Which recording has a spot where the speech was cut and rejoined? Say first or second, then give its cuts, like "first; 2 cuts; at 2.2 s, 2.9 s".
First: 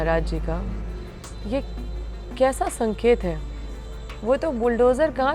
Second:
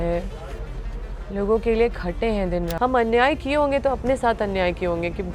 second; 1 cut; at 2.7 s